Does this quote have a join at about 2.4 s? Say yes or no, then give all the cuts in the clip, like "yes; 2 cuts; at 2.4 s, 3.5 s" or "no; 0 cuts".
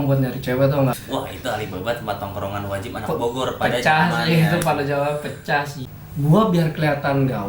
no; 2 cuts; at 1.0 s, 5.8 s